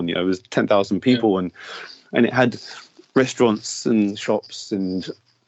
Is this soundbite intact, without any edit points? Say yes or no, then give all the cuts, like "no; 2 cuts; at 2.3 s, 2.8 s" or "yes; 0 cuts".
yes; 0 cuts